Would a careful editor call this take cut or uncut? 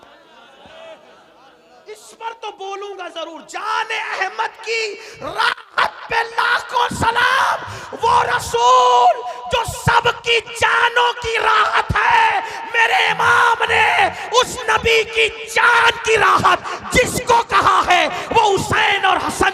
uncut